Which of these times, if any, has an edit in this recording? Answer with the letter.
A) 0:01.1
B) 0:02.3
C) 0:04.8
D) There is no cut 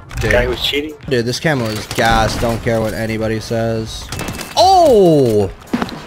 A